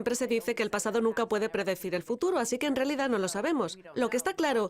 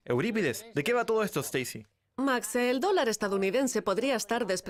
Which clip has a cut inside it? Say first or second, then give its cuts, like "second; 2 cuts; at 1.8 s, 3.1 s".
first; 1 cut; at 1.8 s